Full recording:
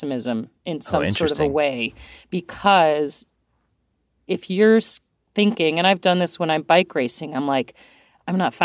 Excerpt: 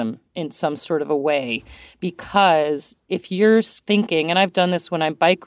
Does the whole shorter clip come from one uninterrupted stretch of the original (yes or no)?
no